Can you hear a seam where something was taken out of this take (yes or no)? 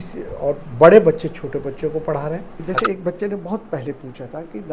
yes